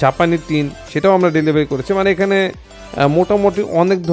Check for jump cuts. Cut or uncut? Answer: uncut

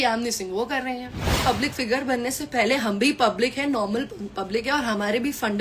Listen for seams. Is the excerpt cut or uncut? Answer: cut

